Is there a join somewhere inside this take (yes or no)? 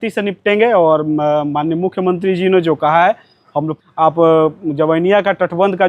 yes